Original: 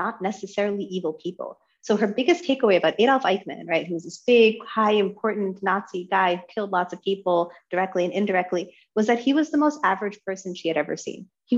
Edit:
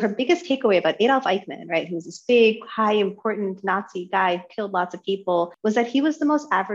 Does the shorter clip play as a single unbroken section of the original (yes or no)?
no